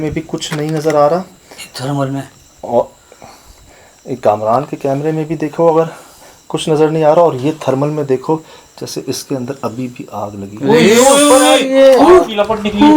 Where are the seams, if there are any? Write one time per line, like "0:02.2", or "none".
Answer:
none